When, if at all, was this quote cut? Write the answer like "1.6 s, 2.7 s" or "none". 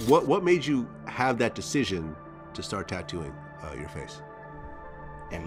none